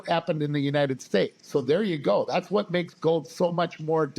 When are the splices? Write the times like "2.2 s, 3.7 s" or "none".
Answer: 1.4 s

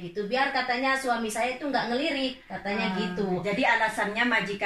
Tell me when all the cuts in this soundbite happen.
none

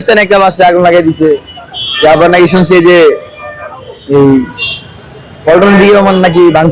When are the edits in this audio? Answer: none

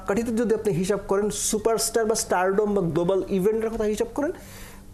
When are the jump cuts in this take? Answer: none

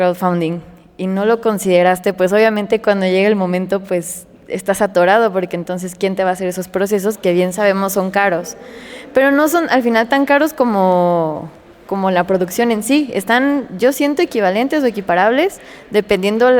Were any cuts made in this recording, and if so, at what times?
none

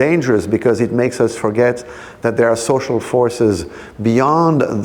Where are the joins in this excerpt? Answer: none

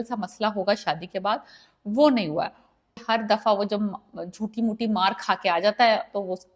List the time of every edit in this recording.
3.0 s

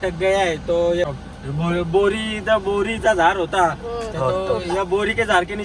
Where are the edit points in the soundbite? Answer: 1.1 s

